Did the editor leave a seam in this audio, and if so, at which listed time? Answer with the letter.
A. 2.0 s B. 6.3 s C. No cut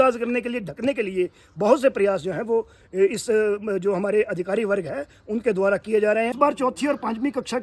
B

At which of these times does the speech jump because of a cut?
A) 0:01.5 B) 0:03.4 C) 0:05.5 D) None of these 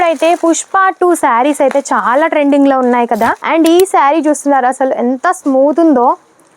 B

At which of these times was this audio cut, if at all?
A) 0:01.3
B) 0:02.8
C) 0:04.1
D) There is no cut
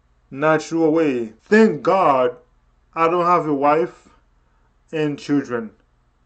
A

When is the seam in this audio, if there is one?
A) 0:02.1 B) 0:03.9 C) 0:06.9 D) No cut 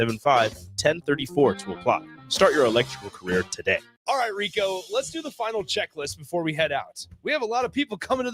B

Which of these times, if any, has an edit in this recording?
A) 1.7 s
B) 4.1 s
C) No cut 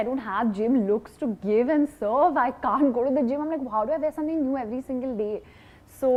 C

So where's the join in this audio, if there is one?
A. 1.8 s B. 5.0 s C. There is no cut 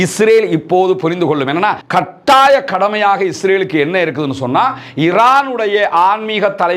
A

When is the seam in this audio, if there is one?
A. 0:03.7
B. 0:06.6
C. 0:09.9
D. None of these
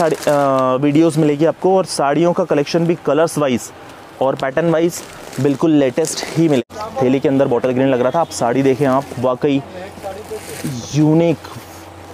B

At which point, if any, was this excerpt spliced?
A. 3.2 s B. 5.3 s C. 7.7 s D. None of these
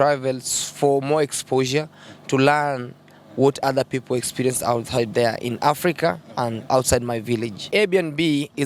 C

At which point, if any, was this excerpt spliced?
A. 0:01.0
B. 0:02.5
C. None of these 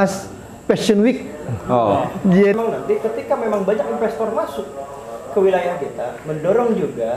B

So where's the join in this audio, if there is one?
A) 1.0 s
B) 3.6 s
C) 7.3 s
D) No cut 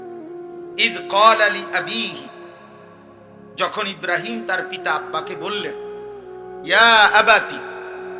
A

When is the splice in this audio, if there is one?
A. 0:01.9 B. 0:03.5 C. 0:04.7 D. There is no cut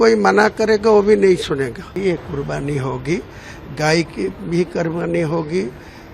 A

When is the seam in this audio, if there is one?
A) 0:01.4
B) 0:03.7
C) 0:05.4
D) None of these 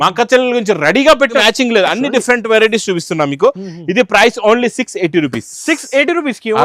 A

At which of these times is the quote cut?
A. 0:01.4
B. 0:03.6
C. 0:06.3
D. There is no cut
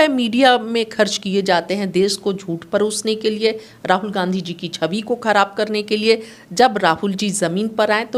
D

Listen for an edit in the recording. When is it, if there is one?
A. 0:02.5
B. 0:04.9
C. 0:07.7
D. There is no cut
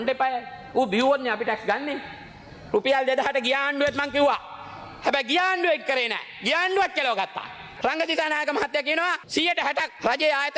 C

